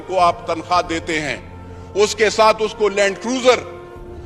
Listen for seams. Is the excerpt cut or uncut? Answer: uncut